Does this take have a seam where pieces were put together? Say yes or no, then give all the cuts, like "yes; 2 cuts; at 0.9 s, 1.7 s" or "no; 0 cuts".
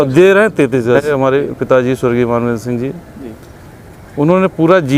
yes; 1 cut; at 1.1 s